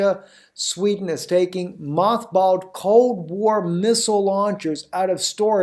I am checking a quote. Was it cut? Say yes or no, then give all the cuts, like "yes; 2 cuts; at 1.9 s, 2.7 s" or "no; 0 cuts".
yes; 1 cut; at 3.7 s